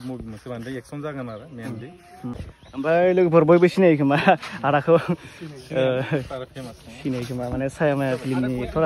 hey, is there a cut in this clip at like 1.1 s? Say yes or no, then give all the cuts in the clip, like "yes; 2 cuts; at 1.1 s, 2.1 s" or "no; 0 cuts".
no; 1 cut; at 2.3 s